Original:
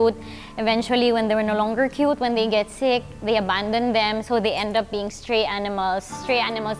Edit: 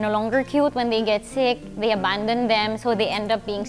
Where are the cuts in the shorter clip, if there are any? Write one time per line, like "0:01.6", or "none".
none